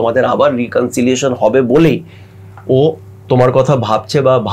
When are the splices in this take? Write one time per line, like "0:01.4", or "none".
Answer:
none